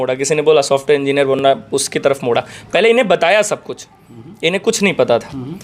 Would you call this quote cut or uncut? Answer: uncut